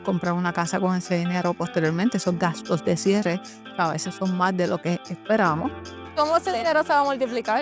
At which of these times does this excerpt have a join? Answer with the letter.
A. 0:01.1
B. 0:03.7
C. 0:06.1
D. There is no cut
C